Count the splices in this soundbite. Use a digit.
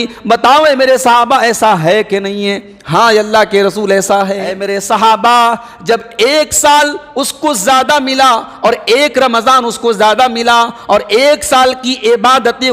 1